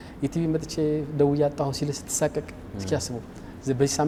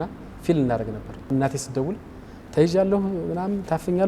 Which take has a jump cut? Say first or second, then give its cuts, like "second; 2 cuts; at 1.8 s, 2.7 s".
second; 1 cut; at 1.3 s